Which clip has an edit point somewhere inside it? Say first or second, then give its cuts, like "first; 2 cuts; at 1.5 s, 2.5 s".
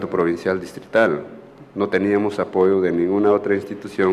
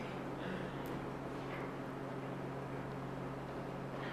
first; 1 cut; at 2.2 s